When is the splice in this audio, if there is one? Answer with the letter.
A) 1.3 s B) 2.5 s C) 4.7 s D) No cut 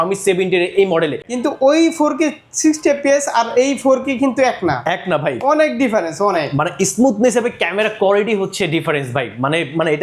A